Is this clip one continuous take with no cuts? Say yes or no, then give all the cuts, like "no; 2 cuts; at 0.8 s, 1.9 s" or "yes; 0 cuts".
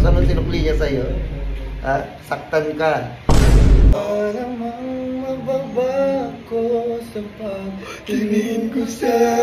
no; 1 cut; at 4.0 s